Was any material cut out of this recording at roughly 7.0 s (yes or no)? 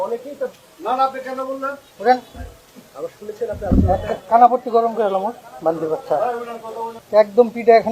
yes